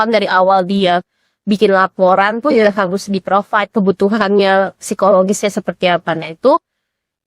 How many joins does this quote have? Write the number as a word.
zero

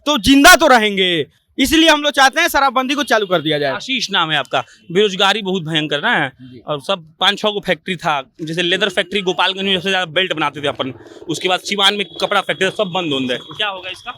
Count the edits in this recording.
zero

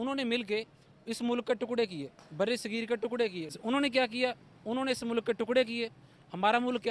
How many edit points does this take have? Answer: one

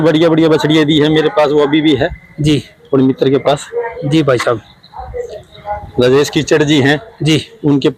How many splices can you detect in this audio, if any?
zero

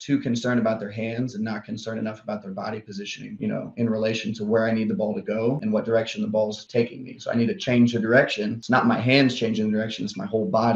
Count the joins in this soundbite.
one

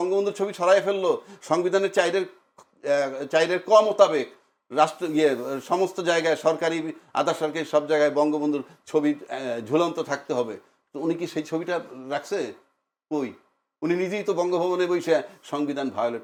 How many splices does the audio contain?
zero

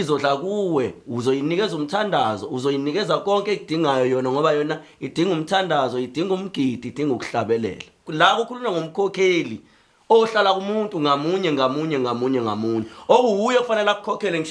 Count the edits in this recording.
one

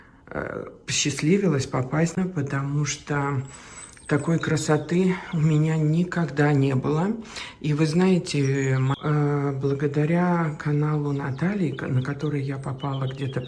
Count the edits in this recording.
two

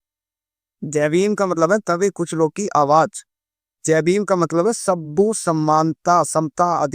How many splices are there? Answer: zero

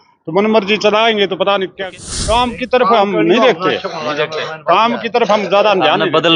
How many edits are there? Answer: one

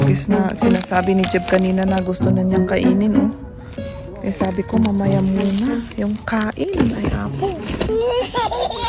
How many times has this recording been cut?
one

